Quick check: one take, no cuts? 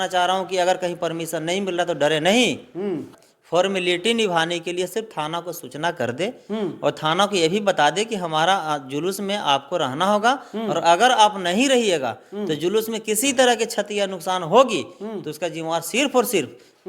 no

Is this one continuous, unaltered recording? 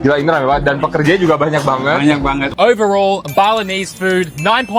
no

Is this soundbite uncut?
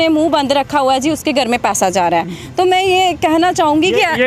yes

